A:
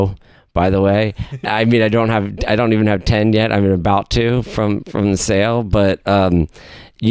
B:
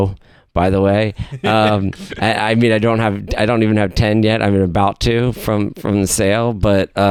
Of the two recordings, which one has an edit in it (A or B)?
A